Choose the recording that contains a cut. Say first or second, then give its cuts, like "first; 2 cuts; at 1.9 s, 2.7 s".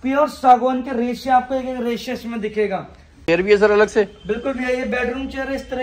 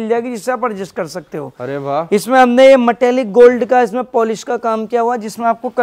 first; 1 cut; at 3.2 s